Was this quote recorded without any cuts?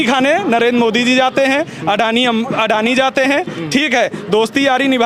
yes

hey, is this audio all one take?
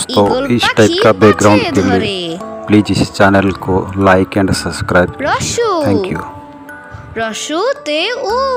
yes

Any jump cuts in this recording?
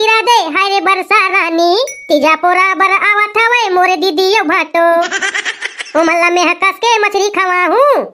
no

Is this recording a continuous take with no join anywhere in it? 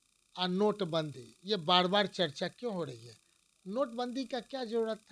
yes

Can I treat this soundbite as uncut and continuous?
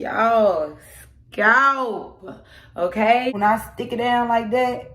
no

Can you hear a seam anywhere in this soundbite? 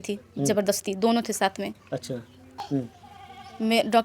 yes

